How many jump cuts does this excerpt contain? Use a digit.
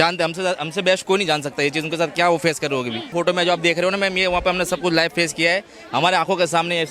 1